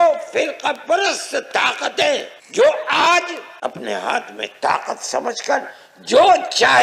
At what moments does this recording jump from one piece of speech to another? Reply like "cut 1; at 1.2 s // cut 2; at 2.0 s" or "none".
cut 1; at 2.4 s // cut 2; at 3.4 s